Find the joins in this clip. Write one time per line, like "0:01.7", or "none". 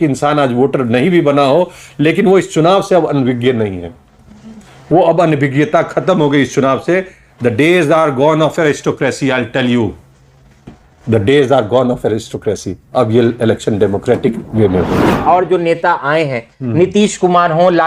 0:15.2